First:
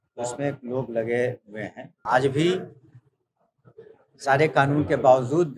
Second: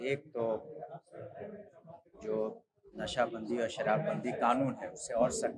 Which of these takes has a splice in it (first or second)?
first